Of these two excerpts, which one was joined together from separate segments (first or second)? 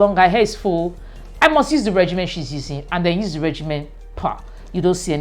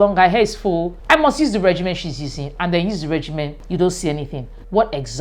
second